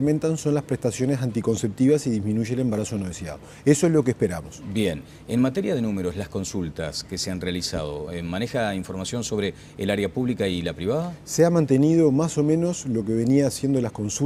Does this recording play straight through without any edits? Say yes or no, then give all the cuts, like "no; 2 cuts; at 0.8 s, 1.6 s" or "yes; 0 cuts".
yes; 0 cuts